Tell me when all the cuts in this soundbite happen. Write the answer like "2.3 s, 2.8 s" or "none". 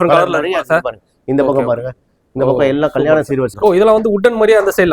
3.5 s